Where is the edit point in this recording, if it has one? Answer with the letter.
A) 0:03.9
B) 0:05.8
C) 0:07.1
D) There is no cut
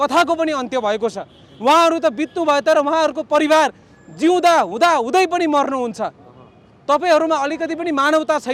D